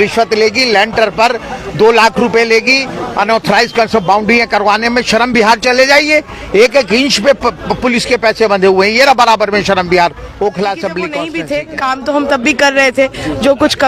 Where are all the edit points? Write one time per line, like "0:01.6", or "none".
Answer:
0:11.2